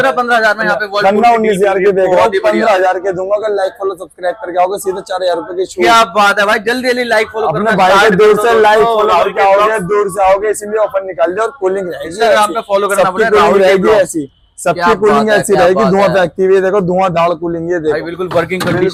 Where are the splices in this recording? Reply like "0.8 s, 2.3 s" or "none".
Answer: none